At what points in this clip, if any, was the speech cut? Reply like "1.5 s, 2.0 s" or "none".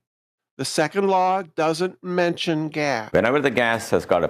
3.0 s